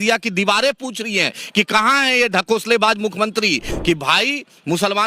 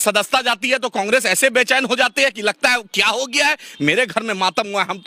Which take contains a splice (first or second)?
first